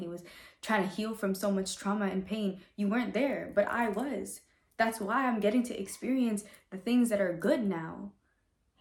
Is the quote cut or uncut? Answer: uncut